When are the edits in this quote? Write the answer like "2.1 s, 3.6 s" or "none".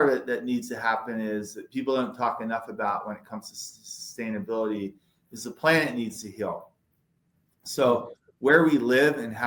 none

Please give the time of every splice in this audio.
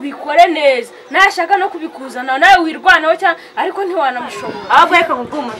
4.5 s

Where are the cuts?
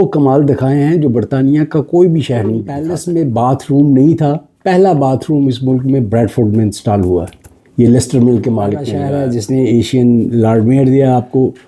2.8 s, 9.0 s

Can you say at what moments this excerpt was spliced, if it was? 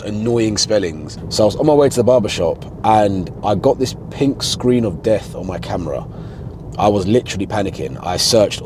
1.1 s

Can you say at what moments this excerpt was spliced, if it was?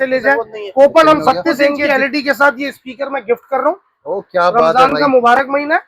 1.8 s

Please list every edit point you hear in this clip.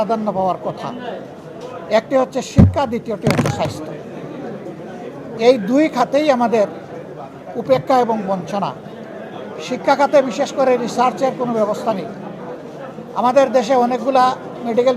none

